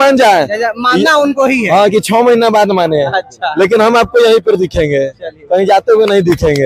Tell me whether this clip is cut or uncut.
uncut